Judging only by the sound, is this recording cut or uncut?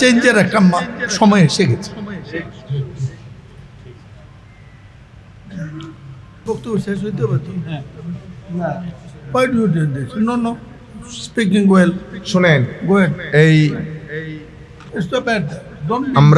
cut